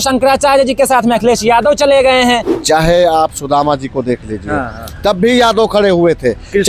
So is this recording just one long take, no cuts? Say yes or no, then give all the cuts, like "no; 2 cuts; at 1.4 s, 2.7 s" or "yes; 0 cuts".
no; 1 cut; at 2.6 s